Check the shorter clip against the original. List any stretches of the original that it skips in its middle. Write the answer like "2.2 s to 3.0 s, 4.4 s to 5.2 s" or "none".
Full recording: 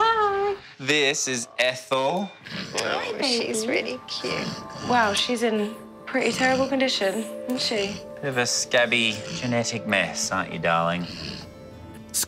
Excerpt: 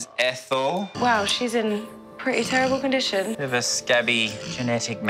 2.3 s to 4.8 s, 7.2 s to 8.2 s